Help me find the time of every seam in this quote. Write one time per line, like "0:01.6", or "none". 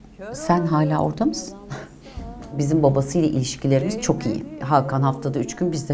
0:02.6
0:04.6